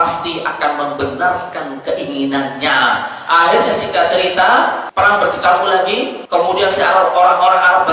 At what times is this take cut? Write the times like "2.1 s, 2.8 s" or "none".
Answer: 4.8 s, 6.2 s